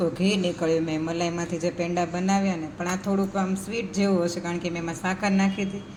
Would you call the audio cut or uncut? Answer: uncut